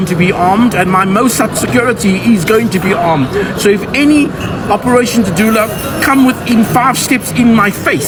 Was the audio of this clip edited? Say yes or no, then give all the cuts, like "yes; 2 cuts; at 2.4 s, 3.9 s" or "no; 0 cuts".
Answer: no; 0 cuts